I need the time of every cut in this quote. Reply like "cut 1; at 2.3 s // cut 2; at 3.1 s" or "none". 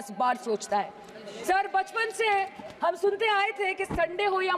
none